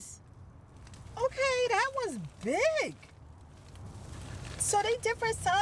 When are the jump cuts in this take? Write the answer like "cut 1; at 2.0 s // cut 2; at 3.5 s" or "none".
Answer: cut 1; at 3.8 s